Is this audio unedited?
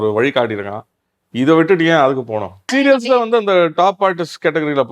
no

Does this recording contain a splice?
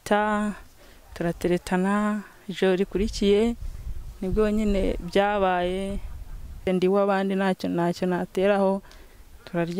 yes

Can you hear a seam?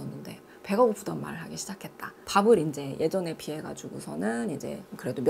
no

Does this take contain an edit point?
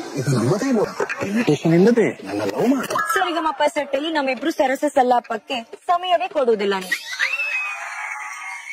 yes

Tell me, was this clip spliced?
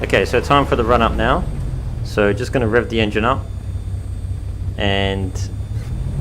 no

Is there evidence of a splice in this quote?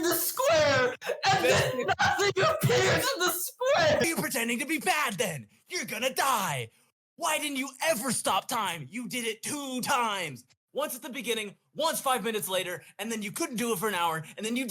yes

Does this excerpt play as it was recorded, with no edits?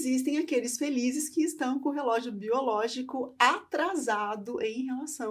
yes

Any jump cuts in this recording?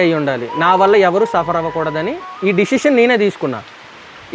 no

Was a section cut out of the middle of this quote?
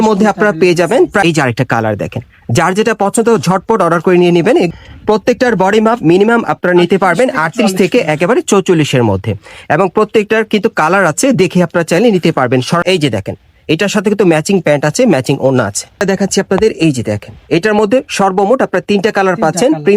yes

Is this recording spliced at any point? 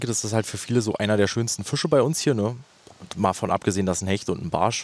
no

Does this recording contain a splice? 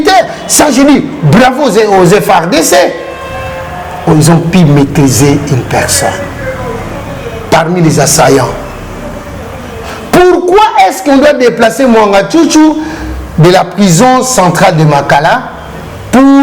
no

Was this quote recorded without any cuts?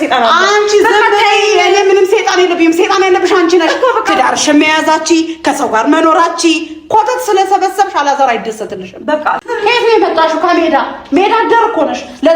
no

